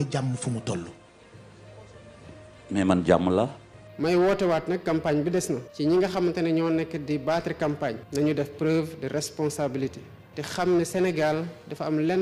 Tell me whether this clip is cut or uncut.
cut